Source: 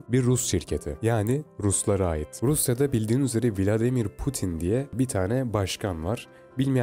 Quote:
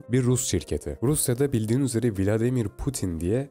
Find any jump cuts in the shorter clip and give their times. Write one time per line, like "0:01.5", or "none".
0:00.9